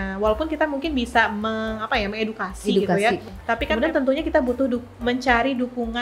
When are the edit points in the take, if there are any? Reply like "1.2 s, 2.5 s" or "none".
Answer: 3.7 s